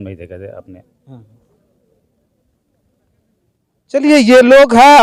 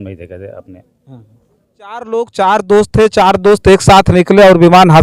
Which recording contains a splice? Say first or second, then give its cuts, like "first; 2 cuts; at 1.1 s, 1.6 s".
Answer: second; 1 cut; at 2.1 s